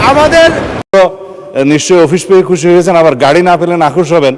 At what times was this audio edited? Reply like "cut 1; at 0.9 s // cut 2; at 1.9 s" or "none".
cut 1; at 0.9 s